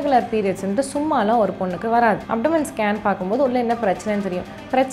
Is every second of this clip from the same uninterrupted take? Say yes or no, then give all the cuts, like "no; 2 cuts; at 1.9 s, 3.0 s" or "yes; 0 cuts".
no; 1 cut; at 2.2 s